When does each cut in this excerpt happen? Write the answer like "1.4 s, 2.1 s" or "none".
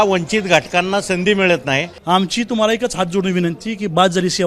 1.9 s